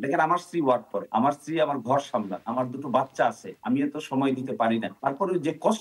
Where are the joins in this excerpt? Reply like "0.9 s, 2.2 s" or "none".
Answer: 1.0 s, 2.4 s, 3.5 s, 4.9 s